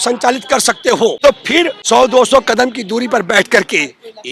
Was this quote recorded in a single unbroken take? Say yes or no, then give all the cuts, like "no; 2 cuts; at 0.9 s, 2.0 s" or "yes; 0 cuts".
no; 1 cut; at 1.6 s